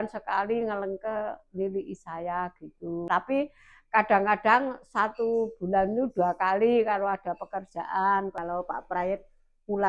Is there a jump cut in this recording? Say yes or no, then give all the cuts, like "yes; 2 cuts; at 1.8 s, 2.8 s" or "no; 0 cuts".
yes; 2 cuts; at 3.1 s, 8.3 s